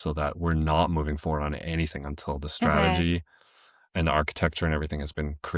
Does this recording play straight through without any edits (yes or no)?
yes